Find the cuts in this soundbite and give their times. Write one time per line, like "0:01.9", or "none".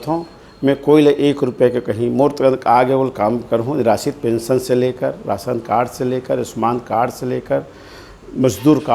none